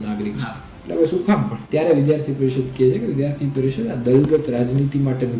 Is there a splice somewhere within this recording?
yes; 1 cut; at 1.6 s

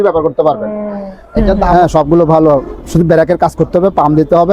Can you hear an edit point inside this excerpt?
yes; 1 cut; at 1.7 s

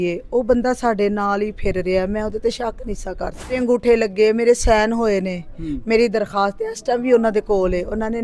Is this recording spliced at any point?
yes; 1 cut; at 3.6 s

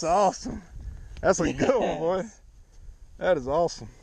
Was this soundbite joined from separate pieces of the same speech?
no; 0 cuts

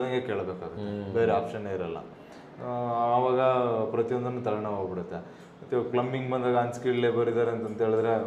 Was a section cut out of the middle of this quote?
no; 0 cuts

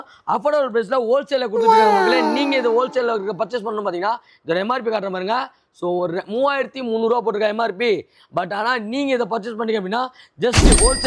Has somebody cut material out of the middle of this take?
no; 0 cuts

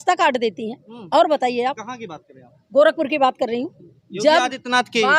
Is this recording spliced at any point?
no; 0 cuts

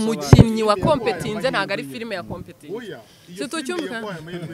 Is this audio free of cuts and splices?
yes; 0 cuts

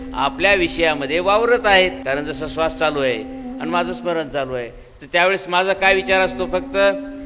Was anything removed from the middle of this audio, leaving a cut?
yes; 1 cut; at 2.0 s

